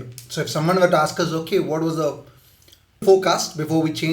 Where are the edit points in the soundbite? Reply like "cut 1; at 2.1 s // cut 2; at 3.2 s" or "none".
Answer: cut 1; at 3.0 s